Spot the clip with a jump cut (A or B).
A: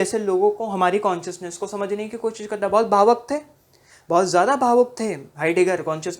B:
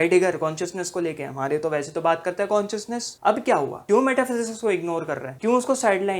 B